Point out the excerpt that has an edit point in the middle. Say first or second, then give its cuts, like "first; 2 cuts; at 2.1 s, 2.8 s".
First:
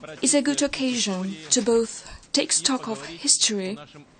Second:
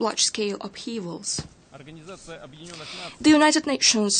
first; 1 cut; at 1.4 s